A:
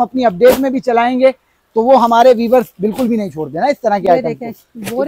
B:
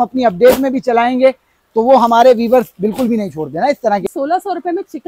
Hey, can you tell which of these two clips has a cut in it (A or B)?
B